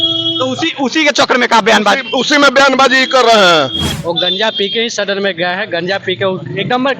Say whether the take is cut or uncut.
cut